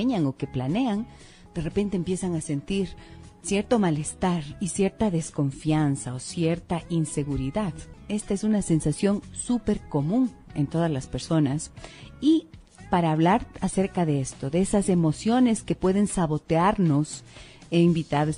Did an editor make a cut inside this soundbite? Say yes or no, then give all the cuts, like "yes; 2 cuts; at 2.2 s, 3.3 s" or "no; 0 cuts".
yes; 1 cut; at 9.0 s